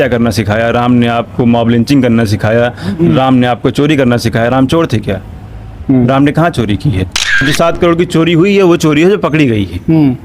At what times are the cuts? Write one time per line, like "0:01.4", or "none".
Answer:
0:07.4

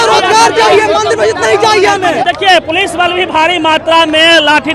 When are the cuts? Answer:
0:02.2

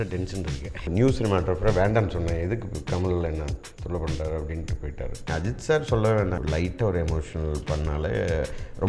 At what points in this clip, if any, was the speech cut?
0:00.9
0:05.2
0:06.4

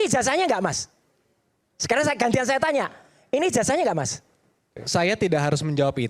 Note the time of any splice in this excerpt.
none

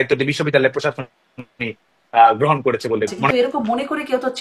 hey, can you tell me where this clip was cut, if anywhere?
0:03.3

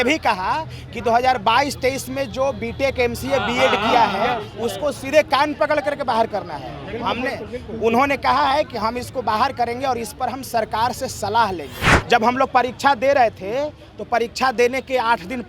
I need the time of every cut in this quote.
0:11.8

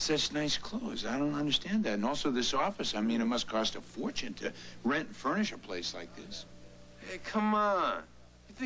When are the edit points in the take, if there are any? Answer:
0:06.6

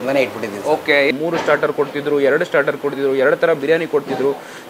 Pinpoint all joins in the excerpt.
0:01.1

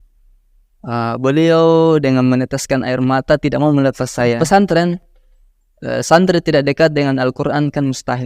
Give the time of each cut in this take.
0:04.4

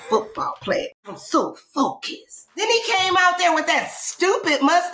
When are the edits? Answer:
0:01.0
0:02.6

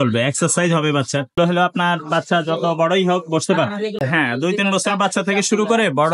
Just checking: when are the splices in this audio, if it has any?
0:01.3
0:04.0

